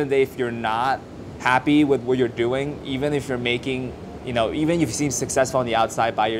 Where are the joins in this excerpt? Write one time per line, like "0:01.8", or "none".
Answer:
none